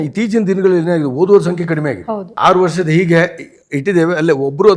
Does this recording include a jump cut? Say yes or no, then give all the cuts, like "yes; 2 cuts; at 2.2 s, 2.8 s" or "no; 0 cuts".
yes; 1 cut; at 2.2 s